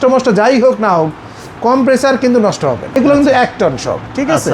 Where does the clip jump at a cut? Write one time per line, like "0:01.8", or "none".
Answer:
0:03.0